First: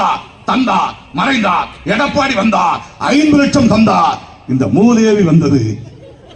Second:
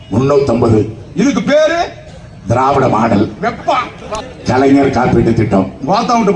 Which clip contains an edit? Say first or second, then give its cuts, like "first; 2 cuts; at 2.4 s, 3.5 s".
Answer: second; 1 cut; at 4.1 s